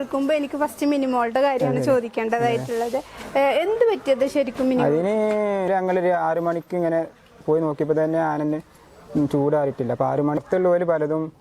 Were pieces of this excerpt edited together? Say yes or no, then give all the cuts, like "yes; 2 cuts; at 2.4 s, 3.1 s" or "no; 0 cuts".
yes; 2 cuts; at 5.7 s, 10.4 s